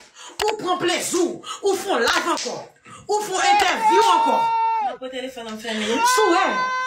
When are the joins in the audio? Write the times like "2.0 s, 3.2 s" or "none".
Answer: none